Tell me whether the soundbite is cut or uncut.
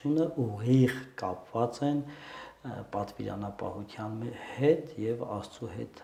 uncut